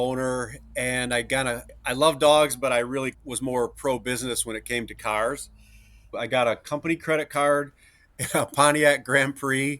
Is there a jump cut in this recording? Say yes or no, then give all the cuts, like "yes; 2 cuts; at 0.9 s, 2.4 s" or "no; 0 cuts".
yes; 3 cuts; at 1.7 s, 3.2 s, 6.1 s